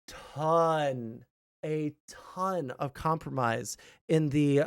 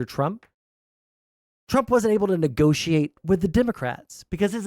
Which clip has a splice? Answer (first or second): second